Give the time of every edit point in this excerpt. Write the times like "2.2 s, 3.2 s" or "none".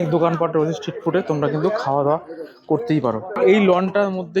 3.3 s